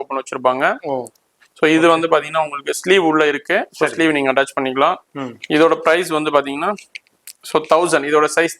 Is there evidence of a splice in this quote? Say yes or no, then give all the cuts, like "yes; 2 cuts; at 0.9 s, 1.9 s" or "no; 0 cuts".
no; 0 cuts